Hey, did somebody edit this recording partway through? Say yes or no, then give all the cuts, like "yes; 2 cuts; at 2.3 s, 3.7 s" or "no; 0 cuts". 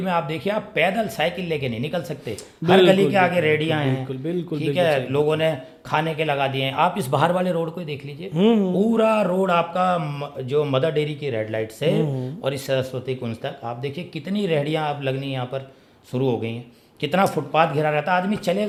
no; 0 cuts